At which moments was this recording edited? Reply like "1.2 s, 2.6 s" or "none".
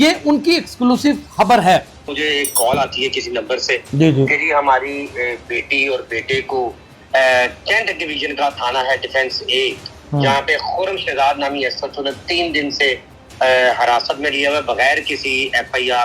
2.0 s